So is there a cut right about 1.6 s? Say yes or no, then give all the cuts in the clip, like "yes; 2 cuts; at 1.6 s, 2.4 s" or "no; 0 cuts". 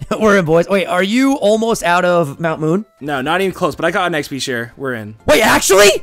no; 2 cuts; at 3.0 s, 5.1 s